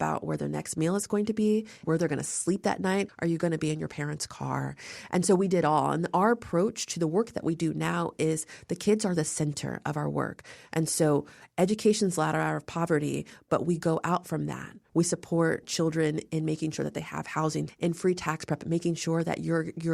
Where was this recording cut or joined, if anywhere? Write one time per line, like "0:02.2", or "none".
0:01.8
0:03.1
0:14.7
0:17.7

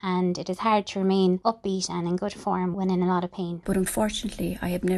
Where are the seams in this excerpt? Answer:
0:01.4
0:02.7
0:03.6

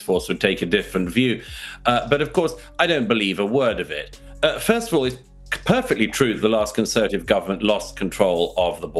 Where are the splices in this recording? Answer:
none

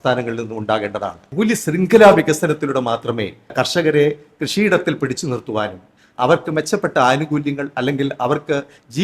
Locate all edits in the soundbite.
0:01.3
0:03.5

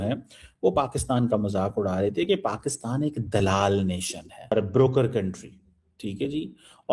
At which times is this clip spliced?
0:04.5

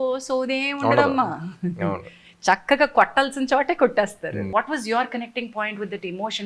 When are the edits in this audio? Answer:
0:04.5

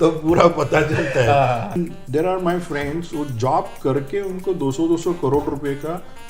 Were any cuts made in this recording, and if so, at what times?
0:01.8

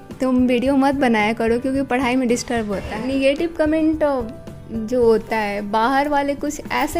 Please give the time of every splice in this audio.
0:03.0

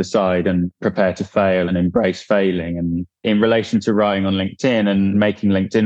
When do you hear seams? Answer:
0:01.7
0:03.0

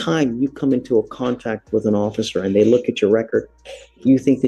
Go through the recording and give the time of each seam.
none

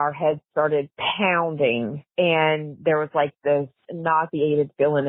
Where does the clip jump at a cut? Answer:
0:03.9

